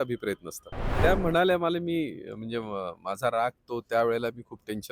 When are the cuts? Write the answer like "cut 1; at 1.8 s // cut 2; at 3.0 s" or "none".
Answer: cut 1; at 1.0 s